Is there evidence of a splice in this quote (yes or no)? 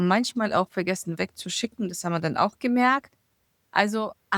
no